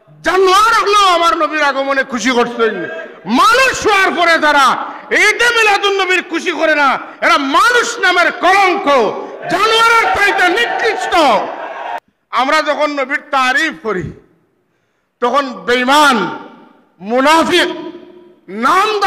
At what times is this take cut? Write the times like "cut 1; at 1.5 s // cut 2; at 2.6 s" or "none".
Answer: cut 1; at 12.0 s